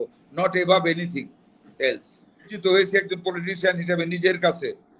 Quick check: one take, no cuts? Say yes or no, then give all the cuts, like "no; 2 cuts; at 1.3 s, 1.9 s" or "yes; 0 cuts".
no; 1 cut; at 2.5 s